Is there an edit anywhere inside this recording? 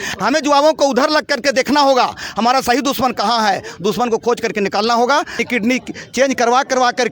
yes; 1 cut; at 5.4 s

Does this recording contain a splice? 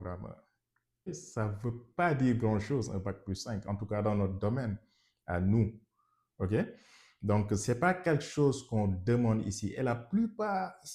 yes; 1 cut; at 1.1 s

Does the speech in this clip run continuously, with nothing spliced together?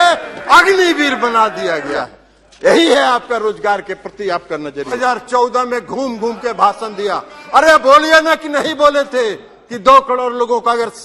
no; 2 cuts; at 2.0 s, 5.0 s

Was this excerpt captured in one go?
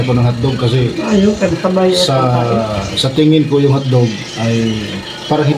yes; 0 cuts

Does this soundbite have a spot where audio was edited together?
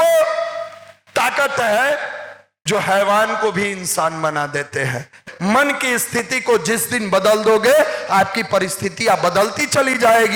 yes; 1 cut; at 5.3 s

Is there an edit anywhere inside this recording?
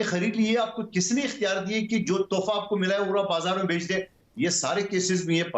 yes; 1 cut; at 4.2 s

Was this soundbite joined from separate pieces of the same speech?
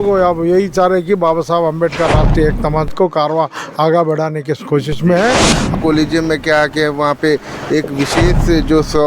yes; 1 cut; at 5.7 s

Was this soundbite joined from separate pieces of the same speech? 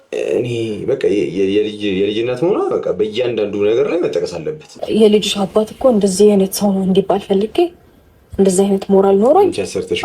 yes; 1 cut; at 4.8 s

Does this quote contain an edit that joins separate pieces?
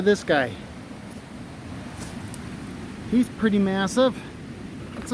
no; 0 cuts

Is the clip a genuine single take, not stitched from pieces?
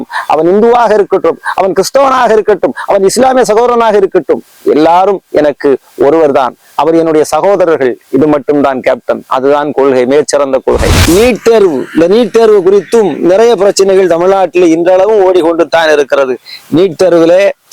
no; 1 cut; at 10.9 s

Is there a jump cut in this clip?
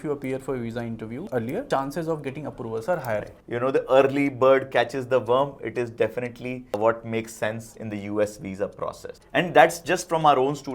yes; 2 cuts; at 3.4 s, 9.1 s

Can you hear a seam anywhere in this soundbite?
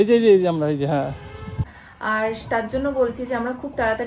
yes; 1 cut; at 1.6 s

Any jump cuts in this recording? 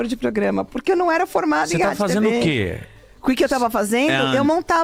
no; 0 cuts

